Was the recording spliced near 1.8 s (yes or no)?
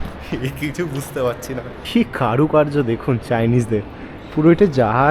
yes